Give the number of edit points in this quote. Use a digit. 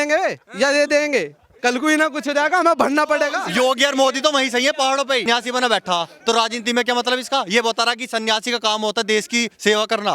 2